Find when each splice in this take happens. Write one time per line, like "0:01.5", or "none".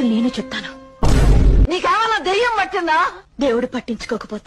none